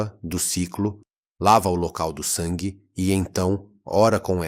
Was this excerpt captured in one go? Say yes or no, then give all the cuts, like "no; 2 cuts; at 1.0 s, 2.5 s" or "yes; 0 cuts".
yes; 0 cuts